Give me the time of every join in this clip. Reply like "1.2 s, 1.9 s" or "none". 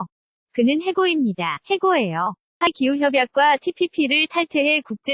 2.7 s